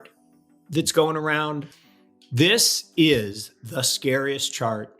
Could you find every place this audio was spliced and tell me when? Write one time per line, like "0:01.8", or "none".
0:01.7